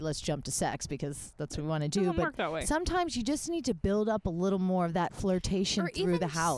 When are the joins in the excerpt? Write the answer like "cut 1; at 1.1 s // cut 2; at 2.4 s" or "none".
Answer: none